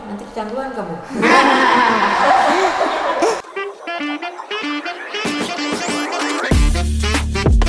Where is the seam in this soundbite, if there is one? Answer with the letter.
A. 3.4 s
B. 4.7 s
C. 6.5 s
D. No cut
A